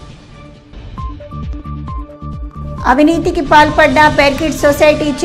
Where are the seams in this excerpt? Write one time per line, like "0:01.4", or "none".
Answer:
none